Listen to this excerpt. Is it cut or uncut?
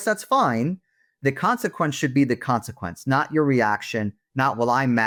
uncut